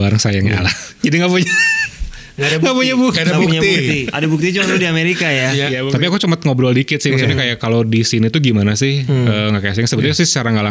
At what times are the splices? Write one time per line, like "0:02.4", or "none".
0:04.1
0:05.9